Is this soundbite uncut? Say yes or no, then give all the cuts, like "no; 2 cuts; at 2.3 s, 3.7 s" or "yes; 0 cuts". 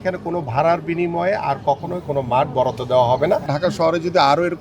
no; 1 cut; at 3.5 s